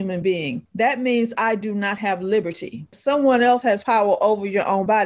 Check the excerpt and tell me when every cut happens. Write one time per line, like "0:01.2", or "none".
0:03.0